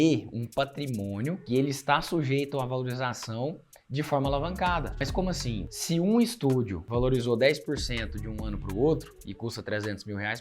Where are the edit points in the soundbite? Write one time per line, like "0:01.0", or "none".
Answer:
0:01.4